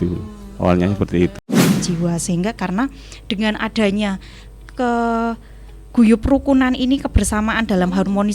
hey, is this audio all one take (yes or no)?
no